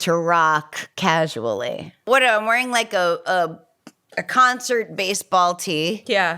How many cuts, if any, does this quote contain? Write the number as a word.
one